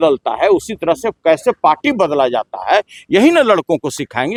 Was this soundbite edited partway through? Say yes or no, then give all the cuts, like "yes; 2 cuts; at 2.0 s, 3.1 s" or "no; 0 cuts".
no; 0 cuts